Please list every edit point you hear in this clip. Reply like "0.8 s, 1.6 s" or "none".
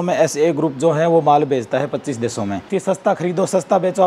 2.6 s